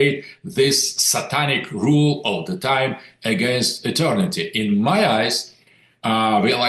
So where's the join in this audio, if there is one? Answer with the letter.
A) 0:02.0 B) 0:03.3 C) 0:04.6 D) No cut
D